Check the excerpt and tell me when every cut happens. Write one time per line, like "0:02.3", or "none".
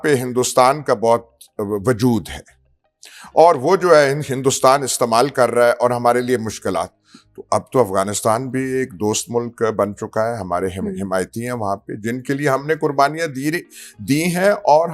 none